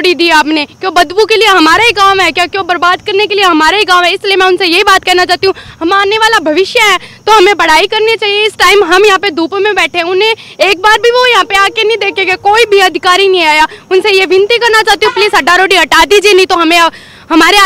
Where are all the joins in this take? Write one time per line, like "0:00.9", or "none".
none